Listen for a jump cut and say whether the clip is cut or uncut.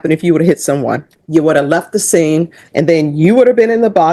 cut